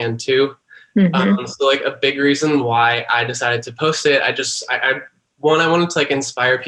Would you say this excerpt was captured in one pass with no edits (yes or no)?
yes